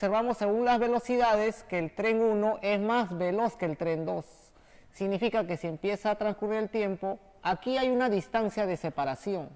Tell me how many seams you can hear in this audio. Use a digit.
1